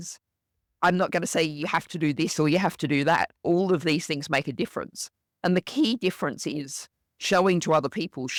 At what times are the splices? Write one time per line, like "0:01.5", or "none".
none